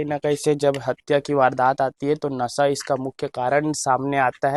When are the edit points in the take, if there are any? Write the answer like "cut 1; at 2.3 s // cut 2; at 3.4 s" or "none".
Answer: none

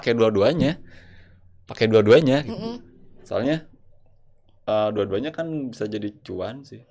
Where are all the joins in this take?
none

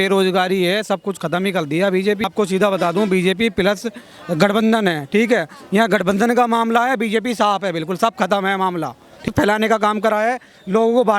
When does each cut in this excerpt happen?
cut 1; at 2.2 s // cut 2; at 9.3 s

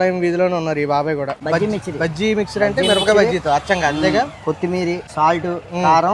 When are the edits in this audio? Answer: cut 1; at 1.4 s // cut 2; at 5.1 s

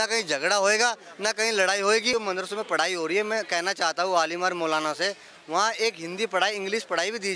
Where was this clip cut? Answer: cut 1; at 2.1 s

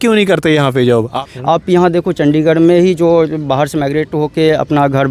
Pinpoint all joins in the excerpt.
cut 1; at 1.1 s

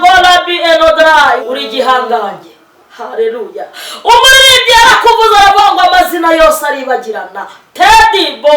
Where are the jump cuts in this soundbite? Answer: cut 1; at 1.4 s

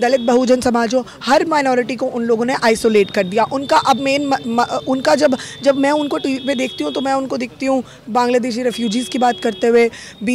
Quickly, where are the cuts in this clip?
none

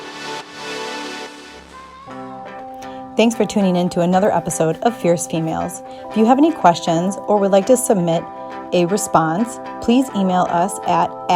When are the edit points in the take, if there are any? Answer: cut 1; at 2.0 s

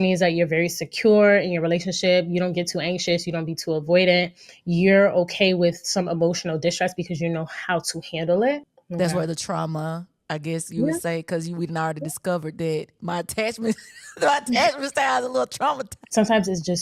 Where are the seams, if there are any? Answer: cut 1; at 8.8 s // cut 2; at 15.9 s

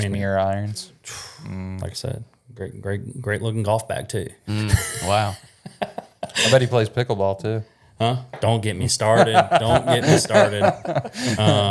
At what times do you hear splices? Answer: cut 1; at 1.8 s

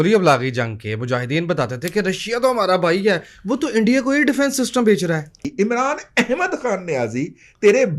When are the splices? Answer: cut 1; at 5.6 s

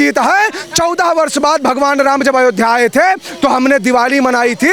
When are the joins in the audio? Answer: none

